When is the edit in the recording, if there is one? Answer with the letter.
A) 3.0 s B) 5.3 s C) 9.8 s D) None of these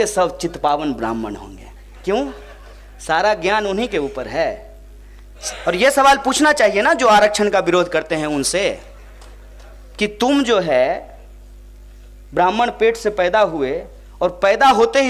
B